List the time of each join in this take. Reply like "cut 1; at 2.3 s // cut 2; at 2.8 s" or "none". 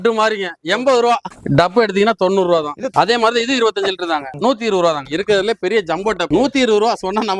cut 1; at 2.9 s // cut 2; at 5.0 s